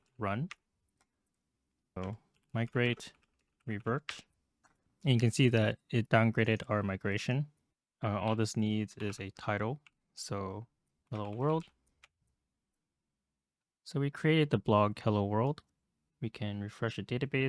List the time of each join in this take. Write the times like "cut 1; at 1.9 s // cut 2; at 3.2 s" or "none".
cut 1; at 2.0 s // cut 2; at 7.7 s